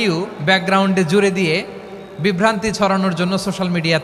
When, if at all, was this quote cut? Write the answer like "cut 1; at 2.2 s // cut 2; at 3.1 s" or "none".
none